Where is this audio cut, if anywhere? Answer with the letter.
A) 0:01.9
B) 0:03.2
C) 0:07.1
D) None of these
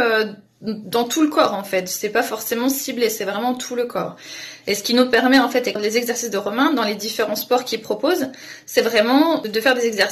D